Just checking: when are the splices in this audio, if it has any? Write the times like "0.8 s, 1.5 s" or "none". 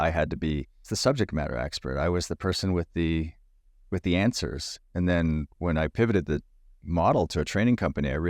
0.9 s